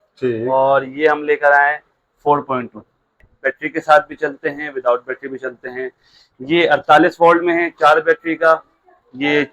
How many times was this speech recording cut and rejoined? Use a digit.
1